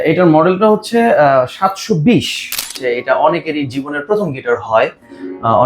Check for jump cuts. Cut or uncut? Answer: cut